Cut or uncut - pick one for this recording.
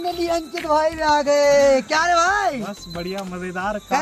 uncut